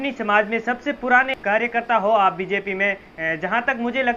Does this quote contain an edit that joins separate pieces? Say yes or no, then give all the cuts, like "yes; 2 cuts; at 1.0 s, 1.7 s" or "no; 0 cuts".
no; 0 cuts